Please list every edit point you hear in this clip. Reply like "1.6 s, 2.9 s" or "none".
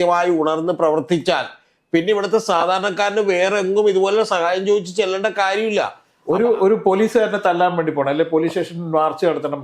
6.1 s